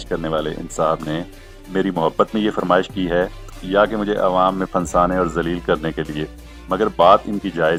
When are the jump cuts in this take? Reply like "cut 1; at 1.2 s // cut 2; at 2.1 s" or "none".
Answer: none